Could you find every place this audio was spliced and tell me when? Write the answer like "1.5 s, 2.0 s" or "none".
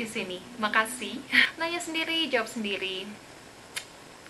1.5 s